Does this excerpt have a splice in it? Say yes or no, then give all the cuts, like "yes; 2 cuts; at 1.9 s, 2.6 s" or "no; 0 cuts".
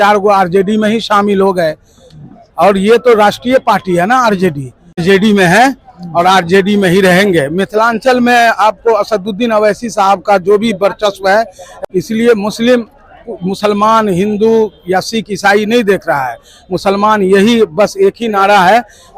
yes; 2 cuts; at 5.0 s, 11.6 s